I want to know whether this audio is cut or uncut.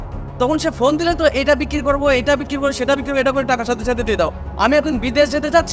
uncut